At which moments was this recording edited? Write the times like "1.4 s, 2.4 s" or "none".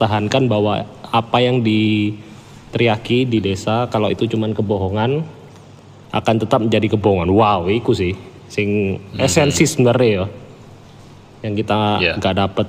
none